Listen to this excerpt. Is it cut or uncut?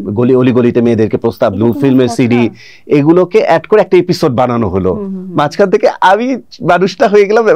uncut